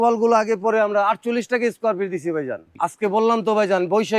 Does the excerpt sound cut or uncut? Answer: cut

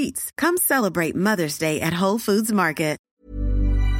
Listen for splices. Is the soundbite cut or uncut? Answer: cut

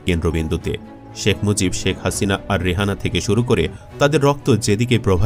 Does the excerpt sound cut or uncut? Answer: uncut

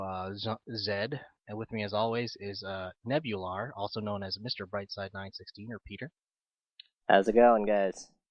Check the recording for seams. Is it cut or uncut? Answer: uncut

